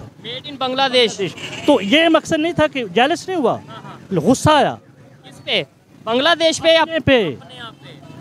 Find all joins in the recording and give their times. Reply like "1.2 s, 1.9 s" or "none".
none